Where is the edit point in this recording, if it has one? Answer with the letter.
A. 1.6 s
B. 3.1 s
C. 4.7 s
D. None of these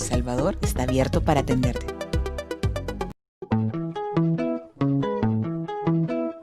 B